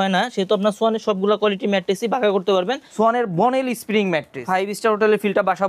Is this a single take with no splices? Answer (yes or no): no